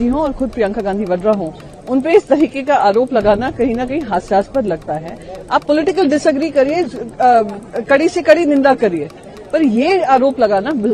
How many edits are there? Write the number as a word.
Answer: zero